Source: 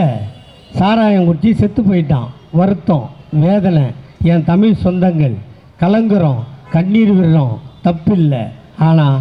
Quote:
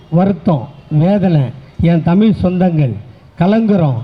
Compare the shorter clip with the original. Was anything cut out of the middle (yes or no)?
no